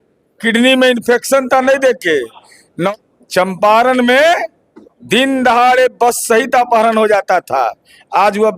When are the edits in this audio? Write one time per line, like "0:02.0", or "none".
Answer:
0:02.9